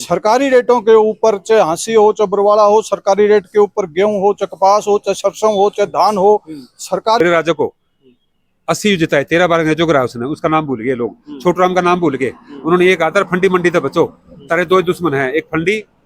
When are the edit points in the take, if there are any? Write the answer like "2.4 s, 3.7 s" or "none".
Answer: 7.2 s